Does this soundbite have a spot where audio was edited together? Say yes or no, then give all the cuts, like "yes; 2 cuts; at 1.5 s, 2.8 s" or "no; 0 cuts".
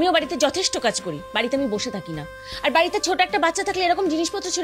no; 0 cuts